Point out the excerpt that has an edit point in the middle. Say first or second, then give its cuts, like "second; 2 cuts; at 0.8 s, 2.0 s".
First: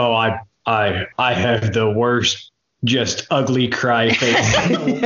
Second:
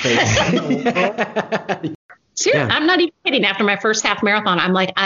second; 1 cut; at 1.9 s